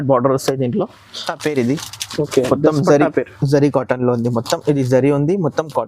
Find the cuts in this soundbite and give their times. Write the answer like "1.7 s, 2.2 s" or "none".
1.3 s